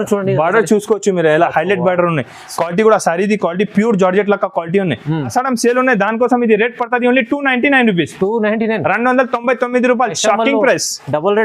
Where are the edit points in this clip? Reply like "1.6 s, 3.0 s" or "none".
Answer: 5.3 s